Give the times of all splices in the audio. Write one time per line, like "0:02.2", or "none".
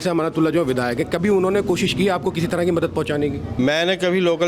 0:03.6